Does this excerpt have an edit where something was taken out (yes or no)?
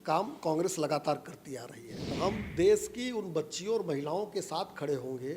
yes